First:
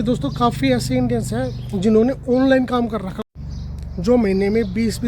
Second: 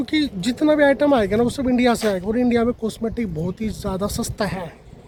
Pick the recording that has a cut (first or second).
first